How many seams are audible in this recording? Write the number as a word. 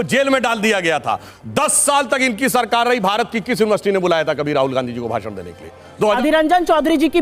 two